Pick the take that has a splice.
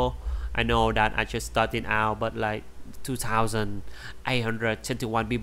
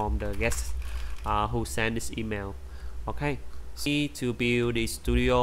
second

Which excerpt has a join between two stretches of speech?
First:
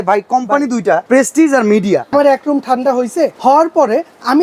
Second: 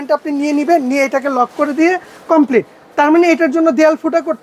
first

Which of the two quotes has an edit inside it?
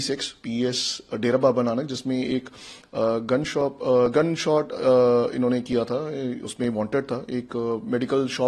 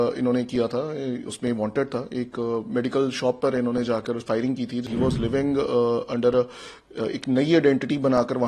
second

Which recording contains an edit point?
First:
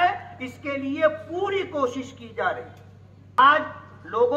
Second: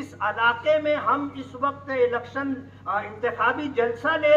first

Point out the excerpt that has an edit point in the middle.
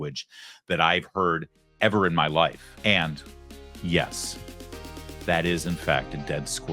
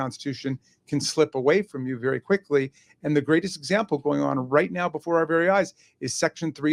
first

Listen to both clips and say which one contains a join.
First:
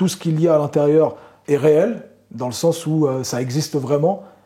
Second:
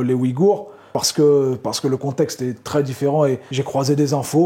second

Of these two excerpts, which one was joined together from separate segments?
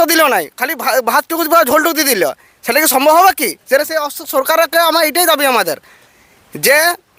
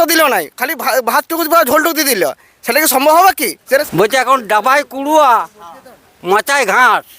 second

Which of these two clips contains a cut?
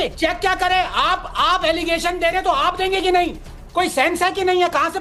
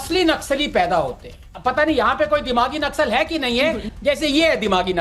second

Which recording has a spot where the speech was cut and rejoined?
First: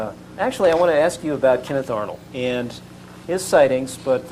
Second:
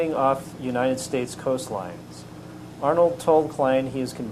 second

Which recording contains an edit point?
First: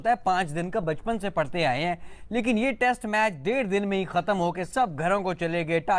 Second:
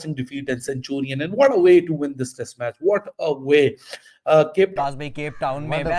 second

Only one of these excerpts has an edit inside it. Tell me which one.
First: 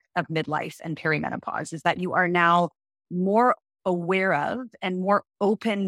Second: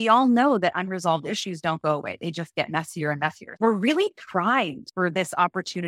second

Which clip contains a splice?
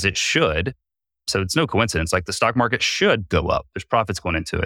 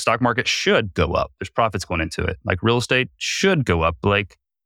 first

